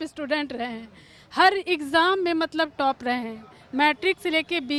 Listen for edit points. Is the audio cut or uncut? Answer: uncut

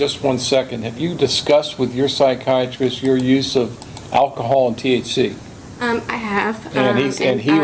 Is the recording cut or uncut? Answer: uncut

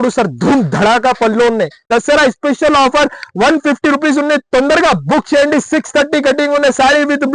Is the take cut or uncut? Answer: cut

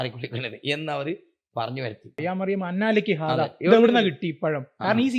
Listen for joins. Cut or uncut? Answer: cut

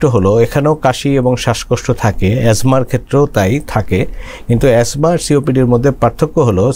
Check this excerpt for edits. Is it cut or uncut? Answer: uncut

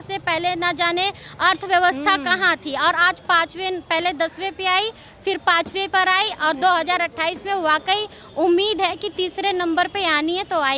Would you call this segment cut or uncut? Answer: uncut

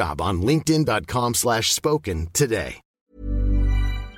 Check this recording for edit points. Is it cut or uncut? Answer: cut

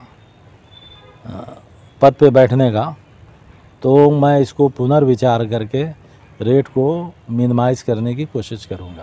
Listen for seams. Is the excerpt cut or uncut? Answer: uncut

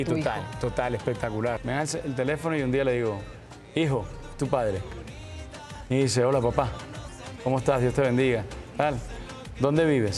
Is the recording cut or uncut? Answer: cut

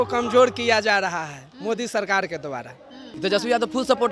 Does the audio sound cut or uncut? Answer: cut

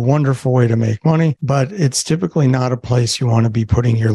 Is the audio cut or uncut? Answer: cut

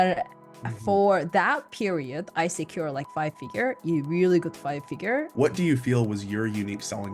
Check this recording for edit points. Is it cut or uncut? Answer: cut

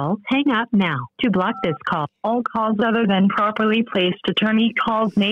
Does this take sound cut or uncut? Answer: cut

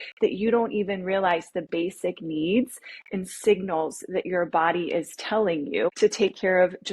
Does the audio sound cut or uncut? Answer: cut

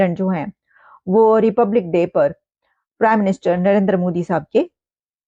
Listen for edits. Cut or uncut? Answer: uncut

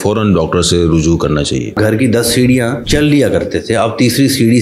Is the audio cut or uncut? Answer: cut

